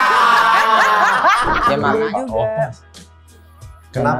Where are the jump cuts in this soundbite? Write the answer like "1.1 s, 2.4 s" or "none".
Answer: 1.9 s